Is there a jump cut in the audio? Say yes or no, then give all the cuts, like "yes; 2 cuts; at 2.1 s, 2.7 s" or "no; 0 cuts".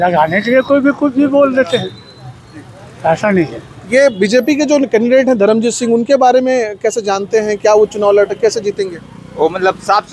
no; 0 cuts